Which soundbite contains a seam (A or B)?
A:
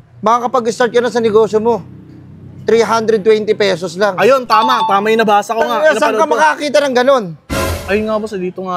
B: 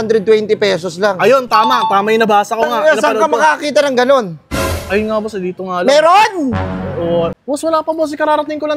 B